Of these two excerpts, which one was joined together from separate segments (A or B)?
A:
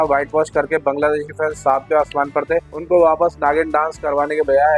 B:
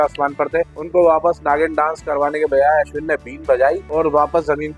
B